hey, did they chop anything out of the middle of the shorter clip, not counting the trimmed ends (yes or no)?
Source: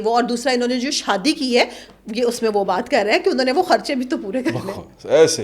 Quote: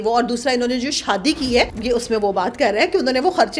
yes